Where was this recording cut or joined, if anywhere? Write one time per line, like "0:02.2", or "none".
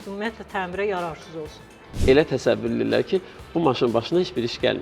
0:01.8